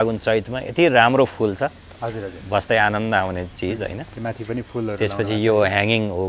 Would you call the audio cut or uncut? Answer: uncut